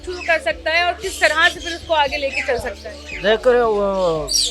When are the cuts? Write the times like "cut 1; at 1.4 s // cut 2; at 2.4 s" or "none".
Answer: none